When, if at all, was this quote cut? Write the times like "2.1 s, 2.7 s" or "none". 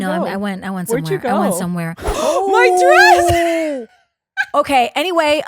2.1 s